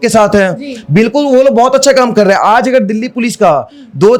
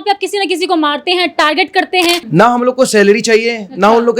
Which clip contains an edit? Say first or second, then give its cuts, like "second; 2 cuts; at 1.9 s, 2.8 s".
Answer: second; 1 cut; at 2.2 s